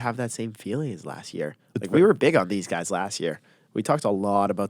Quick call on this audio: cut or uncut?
uncut